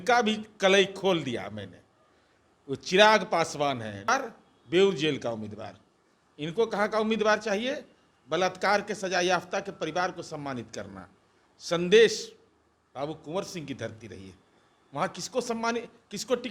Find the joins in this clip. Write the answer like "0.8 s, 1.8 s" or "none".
4.1 s